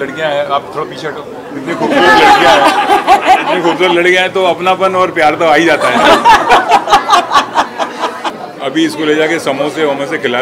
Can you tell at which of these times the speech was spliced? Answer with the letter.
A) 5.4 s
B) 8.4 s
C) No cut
B